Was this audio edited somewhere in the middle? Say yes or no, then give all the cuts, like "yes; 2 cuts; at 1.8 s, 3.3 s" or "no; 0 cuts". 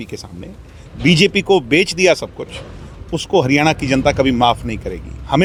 no; 0 cuts